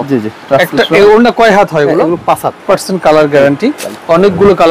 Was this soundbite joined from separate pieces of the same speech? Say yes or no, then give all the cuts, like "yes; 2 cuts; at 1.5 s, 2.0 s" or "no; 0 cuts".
yes; 1 cut; at 2.6 s